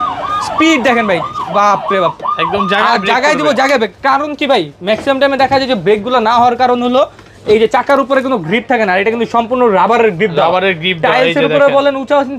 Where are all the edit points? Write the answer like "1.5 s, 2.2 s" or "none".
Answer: none